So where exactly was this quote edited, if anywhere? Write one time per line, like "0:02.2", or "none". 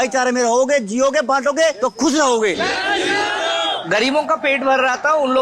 0:02.6
0:03.8